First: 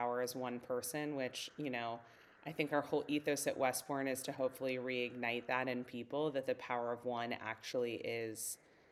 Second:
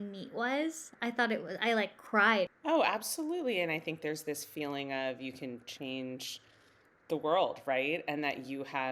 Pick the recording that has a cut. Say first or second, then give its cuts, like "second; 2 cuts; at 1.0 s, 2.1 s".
second; 1 cut; at 2.5 s